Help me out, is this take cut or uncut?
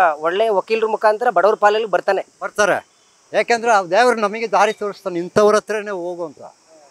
uncut